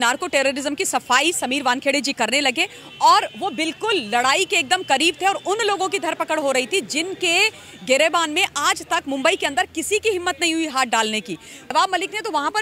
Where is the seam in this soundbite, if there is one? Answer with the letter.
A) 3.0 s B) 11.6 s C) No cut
B